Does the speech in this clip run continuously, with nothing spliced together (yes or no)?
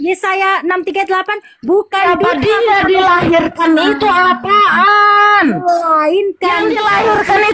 yes